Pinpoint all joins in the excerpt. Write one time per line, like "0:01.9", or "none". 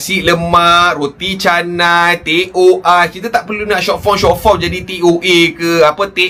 none